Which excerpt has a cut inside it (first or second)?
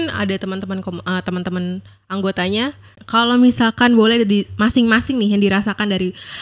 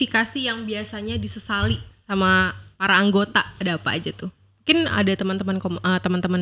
first